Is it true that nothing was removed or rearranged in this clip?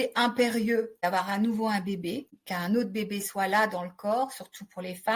no; 2 cuts; at 0.9 s, 2.4 s

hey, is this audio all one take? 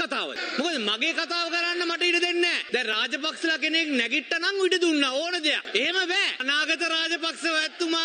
no; 2 cuts; at 2.6 s, 6.4 s

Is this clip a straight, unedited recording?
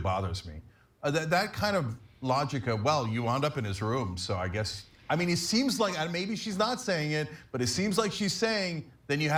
yes; 0 cuts

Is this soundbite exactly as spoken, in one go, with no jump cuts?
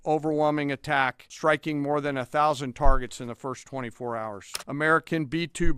no; 2 cuts; at 1.2 s, 4.5 s

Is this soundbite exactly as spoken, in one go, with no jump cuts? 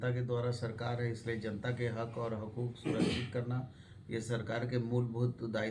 yes; 0 cuts

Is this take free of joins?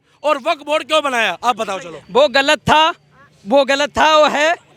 yes; 0 cuts

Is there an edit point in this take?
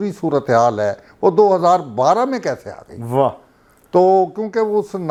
no; 0 cuts

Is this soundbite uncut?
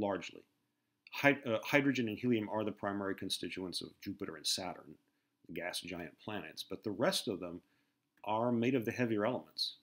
yes; 0 cuts

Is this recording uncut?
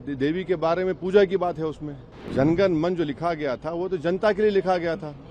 no; 1 cut; at 2.2 s

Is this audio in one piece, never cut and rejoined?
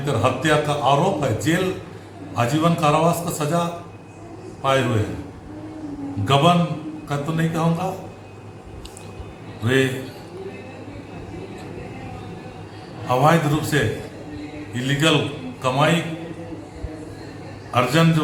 yes; 0 cuts

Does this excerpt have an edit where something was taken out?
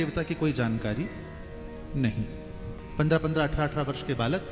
yes; 1 cut; at 2.8 s

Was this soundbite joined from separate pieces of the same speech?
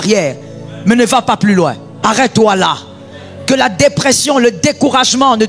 yes; 1 cut; at 1.9 s

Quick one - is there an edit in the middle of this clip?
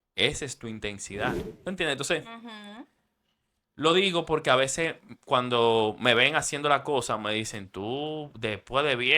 yes; 1 cut; at 1.4 s

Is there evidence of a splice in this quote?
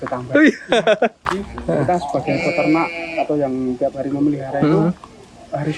yes; 1 cut; at 1.2 s

